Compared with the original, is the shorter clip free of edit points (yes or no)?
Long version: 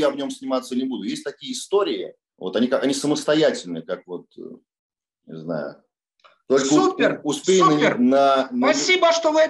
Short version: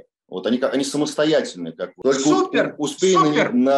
no